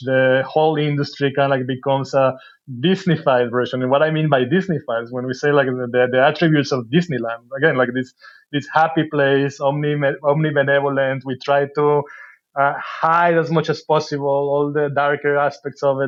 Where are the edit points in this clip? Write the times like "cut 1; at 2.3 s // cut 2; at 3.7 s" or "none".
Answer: none